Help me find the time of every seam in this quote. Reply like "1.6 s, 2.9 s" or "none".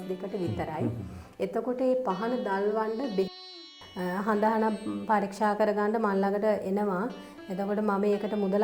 3.5 s